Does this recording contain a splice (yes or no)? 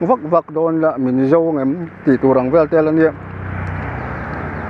no